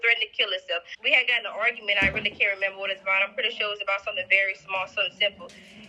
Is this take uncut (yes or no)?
no